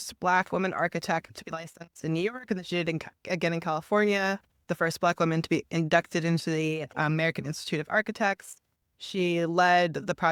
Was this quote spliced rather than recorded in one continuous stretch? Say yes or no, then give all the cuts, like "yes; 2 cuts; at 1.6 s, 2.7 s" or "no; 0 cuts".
no; 0 cuts